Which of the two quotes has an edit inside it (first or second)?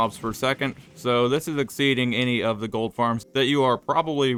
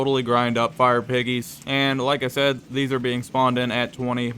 second